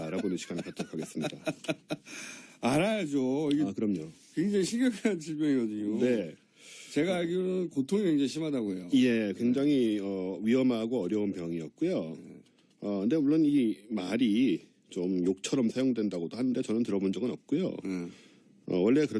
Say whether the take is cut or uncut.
uncut